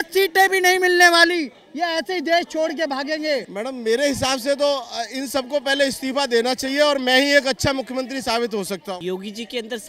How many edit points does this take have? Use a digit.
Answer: 2